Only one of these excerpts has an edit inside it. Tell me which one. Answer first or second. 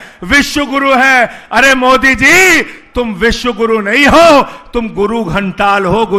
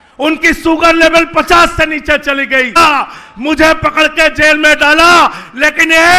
second